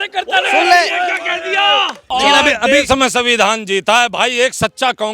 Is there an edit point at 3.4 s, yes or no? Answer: no